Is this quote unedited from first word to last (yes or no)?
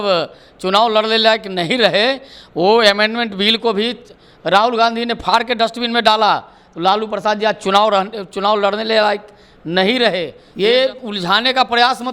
no